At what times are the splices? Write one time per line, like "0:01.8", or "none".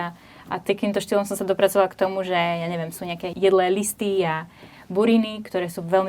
0:03.2